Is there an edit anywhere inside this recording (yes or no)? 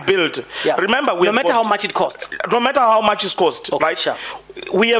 no